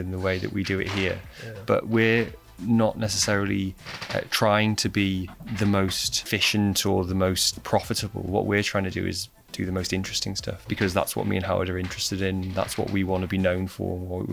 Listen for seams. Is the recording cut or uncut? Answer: cut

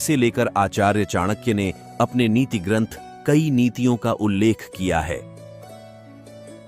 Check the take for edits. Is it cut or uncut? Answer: cut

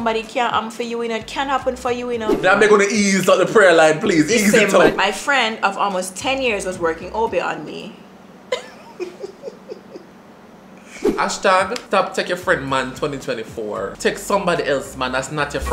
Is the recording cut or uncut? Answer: cut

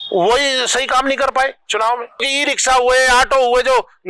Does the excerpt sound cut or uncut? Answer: cut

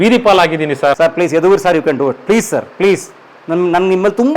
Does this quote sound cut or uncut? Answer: cut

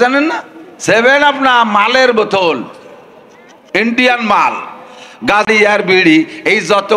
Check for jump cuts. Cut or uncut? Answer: cut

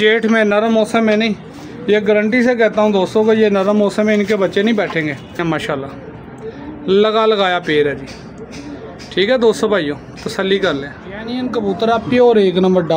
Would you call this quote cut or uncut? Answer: cut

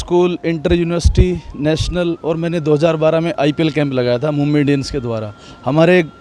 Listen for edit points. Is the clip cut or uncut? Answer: uncut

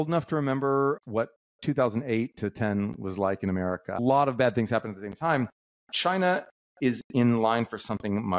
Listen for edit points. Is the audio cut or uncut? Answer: cut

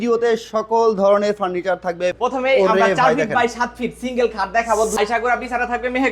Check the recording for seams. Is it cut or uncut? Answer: cut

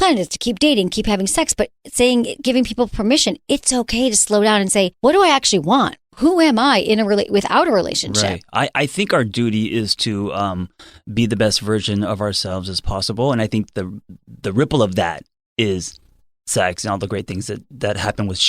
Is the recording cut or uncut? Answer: cut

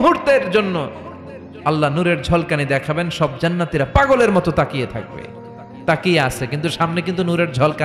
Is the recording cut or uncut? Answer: uncut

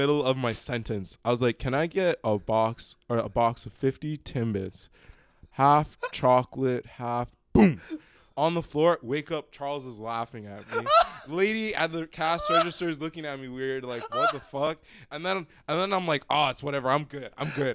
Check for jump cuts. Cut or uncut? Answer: uncut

